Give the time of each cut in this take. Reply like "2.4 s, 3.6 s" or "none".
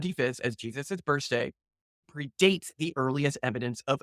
2.1 s

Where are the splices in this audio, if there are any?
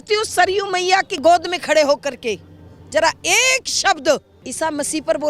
1.2 s, 4.4 s

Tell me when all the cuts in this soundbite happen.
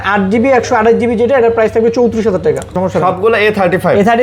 2.7 s

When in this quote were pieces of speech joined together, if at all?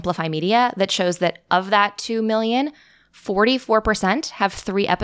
none

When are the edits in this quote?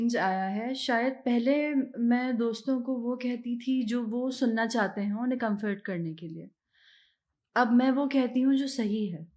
none

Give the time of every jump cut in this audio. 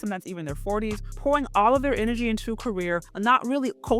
1.1 s, 3.1 s

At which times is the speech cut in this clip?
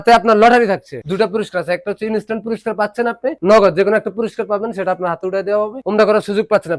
1.0 s, 3.4 s, 5.8 s

